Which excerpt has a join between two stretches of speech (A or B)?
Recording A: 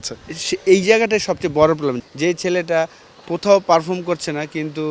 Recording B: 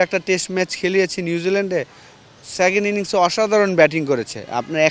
A